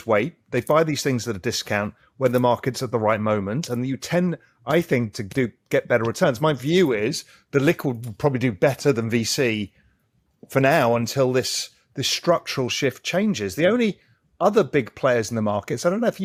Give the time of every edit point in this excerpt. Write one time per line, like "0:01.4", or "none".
none